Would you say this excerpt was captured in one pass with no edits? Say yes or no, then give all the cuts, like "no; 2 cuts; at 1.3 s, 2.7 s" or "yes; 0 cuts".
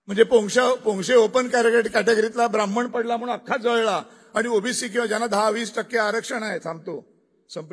yes; 0 cuts